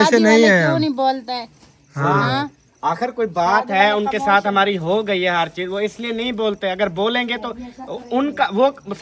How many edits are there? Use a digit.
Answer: 0